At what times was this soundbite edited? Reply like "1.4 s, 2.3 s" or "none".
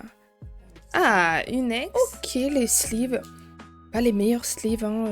1.8 s

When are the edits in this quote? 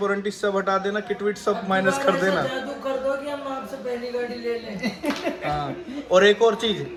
none

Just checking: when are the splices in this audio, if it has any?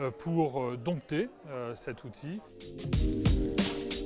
2.6 s

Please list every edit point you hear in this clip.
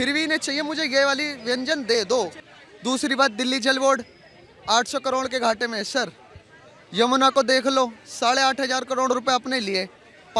2.4 s

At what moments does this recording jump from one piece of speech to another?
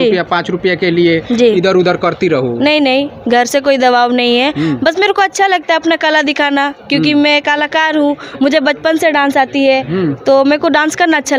none

